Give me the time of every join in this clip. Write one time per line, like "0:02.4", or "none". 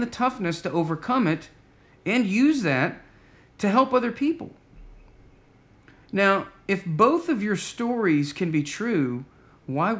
none

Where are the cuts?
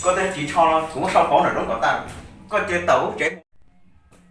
0:03.3

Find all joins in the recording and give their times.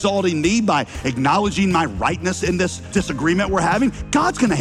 0:02.9

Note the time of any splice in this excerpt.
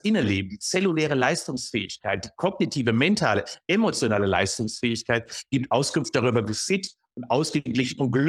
none

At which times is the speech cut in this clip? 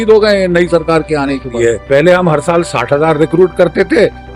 0:01.5

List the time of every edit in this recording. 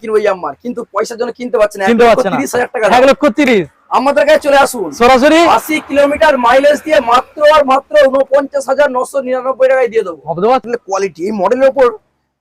0:10.6

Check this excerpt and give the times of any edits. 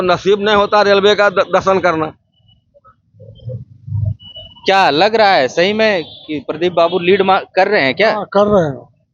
none

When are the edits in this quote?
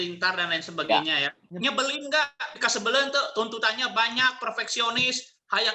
0:01.4

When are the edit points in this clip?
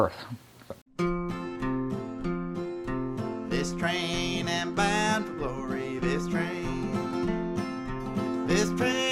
0:00.9

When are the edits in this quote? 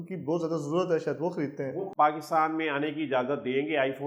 0:01.7

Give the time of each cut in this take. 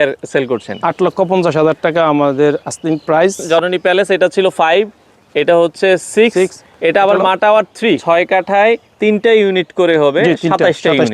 0:03.4
0:08.0

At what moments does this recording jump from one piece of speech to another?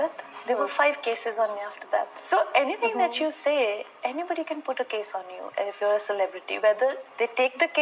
0:02.2

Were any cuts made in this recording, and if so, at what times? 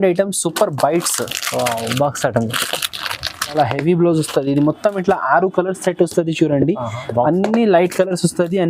0:03.5

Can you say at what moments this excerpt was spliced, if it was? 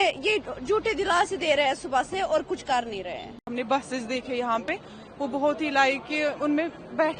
none

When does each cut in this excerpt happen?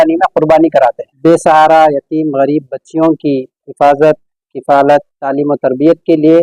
0:01.1

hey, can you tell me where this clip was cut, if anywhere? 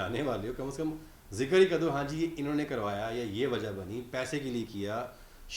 none

